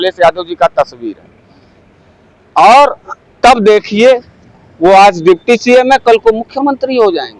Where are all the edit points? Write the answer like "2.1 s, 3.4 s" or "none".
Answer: none